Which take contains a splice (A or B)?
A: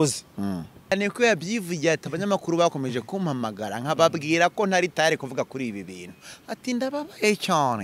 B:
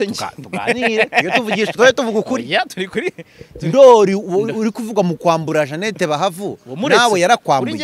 A